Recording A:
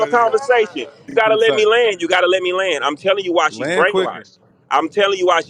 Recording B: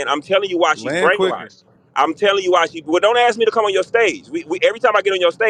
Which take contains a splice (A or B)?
A